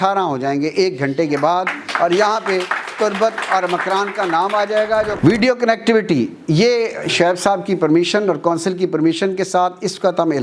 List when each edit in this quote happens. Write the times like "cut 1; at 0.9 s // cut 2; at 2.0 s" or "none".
cut 1; at 5.2 s